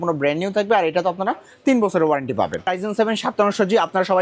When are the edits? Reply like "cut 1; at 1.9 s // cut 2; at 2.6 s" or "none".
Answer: cut 1; at 2.7 s